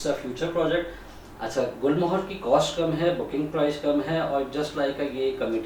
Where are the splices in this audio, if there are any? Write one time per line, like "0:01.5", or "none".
none